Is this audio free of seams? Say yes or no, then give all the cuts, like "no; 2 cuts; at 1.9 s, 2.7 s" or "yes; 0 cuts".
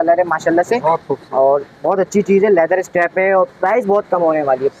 yes; 0 cuts